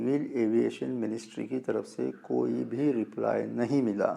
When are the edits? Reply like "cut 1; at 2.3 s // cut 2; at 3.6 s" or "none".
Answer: none